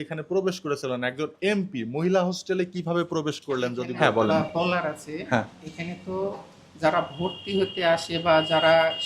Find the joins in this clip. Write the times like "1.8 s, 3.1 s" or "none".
3.9 s